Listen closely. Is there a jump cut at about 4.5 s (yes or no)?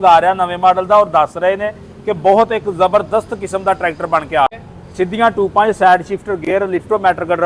yes